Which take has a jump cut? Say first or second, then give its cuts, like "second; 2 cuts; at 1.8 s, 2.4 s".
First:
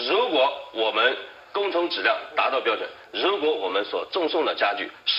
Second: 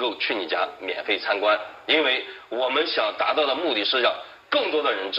second; 1 cut; at 0.9 s